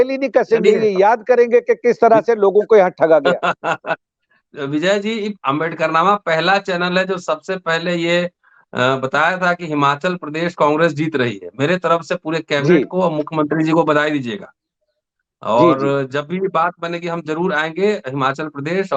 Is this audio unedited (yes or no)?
yes